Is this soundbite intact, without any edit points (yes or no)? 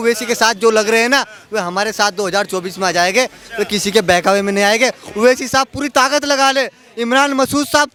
yes